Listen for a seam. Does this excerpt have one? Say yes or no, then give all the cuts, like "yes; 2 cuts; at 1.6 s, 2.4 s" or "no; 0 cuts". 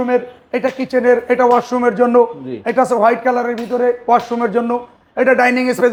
no; 0 cuts